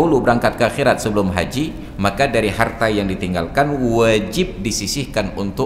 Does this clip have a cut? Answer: no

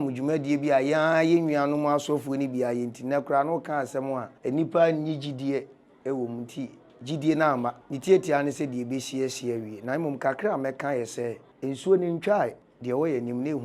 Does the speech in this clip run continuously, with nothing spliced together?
no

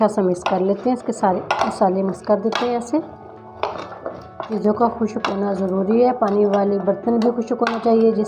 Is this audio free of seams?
no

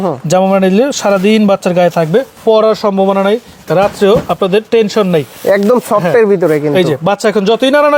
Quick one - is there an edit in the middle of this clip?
no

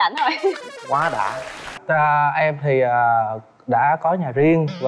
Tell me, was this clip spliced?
yes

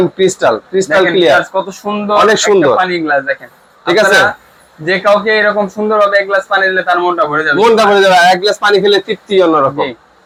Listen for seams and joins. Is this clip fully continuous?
yes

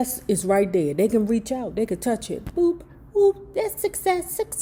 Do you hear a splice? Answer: no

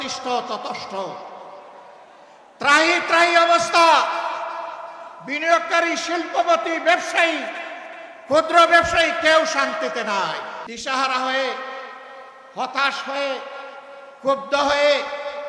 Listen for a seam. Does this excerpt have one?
yes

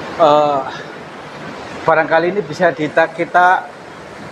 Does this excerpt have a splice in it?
no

